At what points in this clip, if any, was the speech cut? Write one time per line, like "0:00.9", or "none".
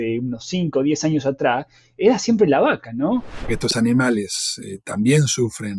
0:03.5